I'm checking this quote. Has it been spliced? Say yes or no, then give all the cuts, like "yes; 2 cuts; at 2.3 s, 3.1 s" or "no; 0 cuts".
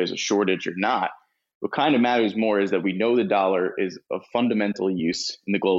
no; 0 cuts